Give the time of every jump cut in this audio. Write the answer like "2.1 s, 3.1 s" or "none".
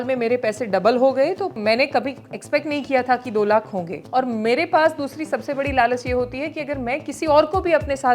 1.6 s, 4.0 s